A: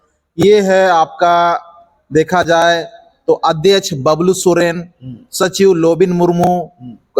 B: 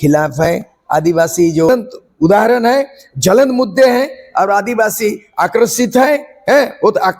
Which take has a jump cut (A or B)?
B